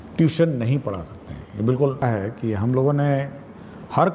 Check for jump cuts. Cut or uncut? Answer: cut